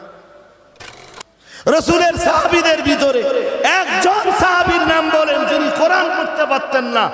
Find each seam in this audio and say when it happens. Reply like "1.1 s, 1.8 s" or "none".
1.0 s